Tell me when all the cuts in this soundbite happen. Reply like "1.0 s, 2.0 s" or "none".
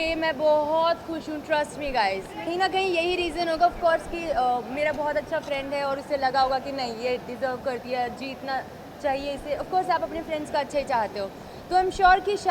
2.5 s